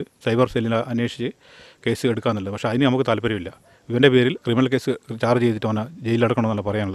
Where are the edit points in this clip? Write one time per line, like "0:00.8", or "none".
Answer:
none